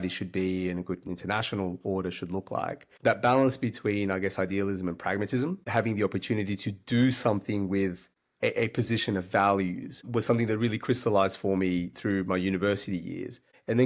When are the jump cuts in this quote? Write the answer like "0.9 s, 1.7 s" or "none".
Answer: 2.8 s